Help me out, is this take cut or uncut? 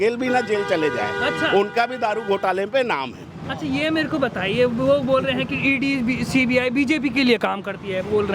uncut